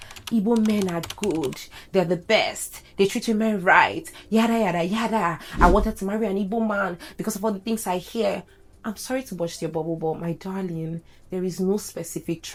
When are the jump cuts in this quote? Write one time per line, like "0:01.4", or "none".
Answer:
none